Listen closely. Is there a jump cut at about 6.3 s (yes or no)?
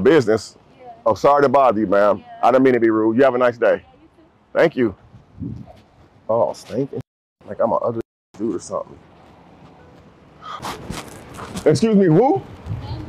yes